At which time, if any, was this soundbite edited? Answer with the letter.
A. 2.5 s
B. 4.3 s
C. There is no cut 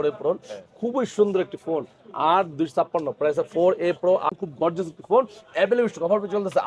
B